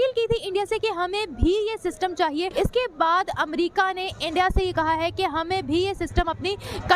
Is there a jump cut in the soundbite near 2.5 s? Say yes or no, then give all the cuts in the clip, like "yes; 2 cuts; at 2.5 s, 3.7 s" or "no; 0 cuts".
yes; 1 cut; at 2.5 s